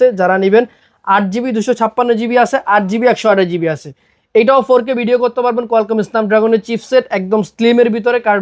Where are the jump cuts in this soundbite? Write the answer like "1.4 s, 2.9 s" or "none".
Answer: none

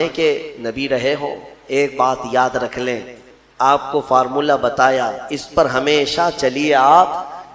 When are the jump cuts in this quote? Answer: 3.3 s

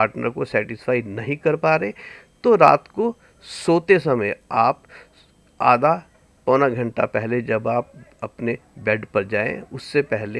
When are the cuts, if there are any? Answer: none

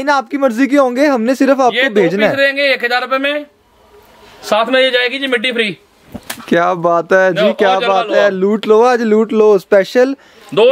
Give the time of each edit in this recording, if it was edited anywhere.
none

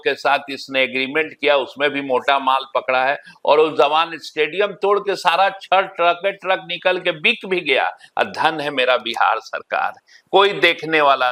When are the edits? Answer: none

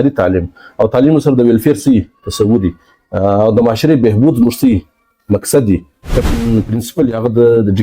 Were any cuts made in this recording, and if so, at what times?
6.3 s

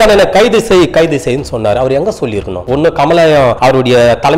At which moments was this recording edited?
2.6 s, 3.6 s

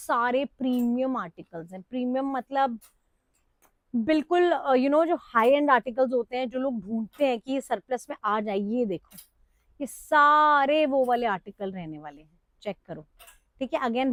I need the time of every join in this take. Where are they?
none

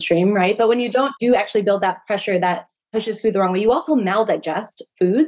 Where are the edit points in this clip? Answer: 1.1 s

